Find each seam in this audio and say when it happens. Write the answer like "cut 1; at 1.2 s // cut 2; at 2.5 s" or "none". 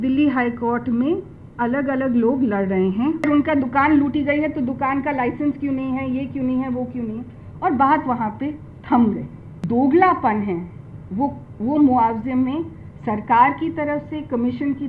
cut 1; at 3.2 s // cut 2; at 9.5 s